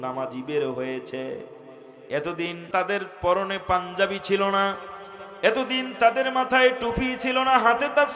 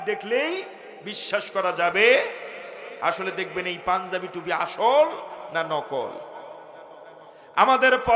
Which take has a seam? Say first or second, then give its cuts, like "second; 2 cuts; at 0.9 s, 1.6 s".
first; 1 cut; at 2.7 s